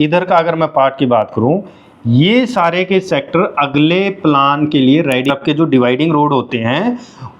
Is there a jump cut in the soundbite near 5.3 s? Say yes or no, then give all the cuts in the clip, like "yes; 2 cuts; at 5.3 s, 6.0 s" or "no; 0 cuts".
yes; 1 cut; at 5.3 s